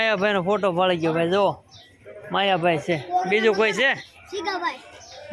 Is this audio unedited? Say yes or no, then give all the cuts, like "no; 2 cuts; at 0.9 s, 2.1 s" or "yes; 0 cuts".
yes; 0 cuts